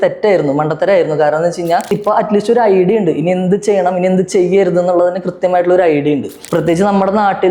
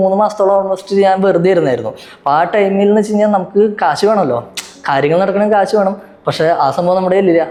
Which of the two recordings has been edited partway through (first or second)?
first